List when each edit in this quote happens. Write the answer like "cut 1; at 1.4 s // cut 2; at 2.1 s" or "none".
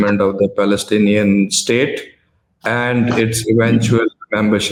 none